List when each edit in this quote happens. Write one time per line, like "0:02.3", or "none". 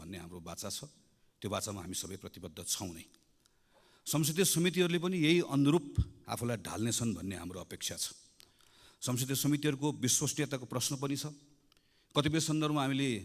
none